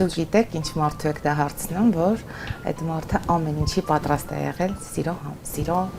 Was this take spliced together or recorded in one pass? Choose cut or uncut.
uncut